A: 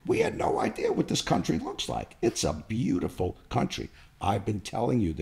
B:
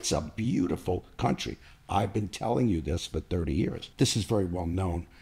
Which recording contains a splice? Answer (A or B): B